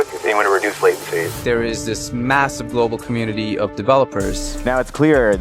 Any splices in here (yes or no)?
yes